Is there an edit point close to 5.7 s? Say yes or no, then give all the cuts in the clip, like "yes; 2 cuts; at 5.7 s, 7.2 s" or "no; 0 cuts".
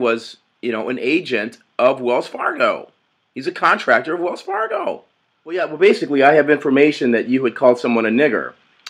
yes; 1 cut; at 5.7 s